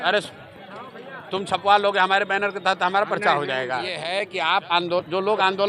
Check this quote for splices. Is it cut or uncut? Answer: cut